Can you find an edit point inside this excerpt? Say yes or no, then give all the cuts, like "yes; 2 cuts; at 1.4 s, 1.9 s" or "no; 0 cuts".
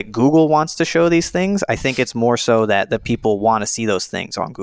no; 0 cuts